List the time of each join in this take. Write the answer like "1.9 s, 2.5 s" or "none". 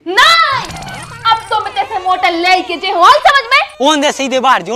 3.7 s